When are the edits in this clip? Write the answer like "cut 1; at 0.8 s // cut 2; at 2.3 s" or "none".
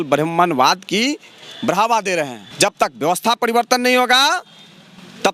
cut 1; at 2.4 s